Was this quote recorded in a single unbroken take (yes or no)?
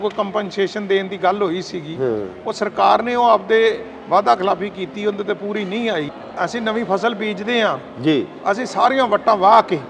no